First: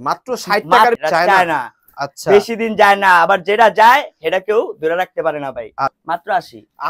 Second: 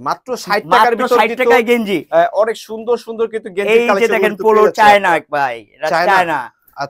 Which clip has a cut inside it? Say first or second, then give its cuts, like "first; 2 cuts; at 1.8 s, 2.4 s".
first; 2 cuts; at 1.0 s, 5.9 s